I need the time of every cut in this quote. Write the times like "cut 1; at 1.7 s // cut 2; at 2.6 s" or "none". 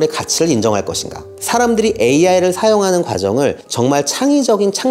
cut 1; at 1.3 s